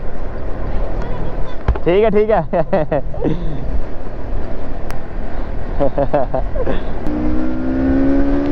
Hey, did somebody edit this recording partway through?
no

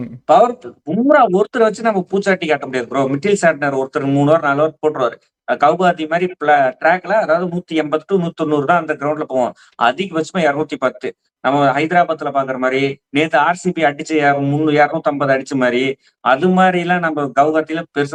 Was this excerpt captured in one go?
yes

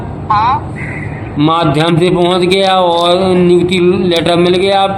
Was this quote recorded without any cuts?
yes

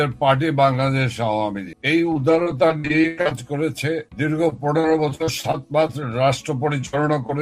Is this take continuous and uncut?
yes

